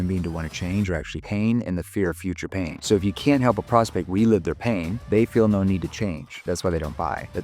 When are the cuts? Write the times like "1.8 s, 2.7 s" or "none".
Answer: 5.0 s, 6.4 s